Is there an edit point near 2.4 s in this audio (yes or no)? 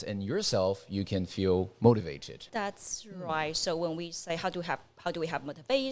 yes